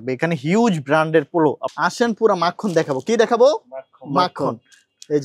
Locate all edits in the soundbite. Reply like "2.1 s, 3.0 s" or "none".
1.6 s